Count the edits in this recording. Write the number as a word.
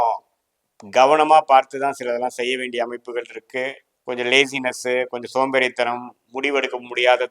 one